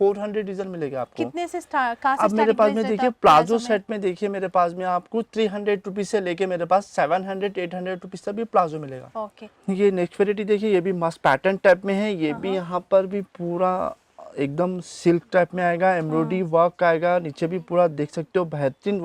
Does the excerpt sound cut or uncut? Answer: uncut